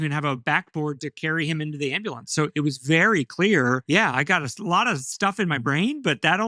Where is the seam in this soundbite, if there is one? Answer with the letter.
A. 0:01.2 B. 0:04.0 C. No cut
B